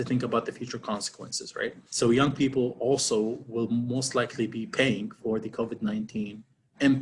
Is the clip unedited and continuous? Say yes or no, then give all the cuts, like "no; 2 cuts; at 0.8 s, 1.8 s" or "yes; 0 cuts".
yes; 0 cuts